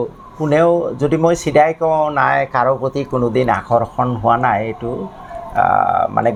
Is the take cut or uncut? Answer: uncut